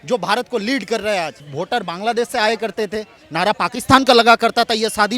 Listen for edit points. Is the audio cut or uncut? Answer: cut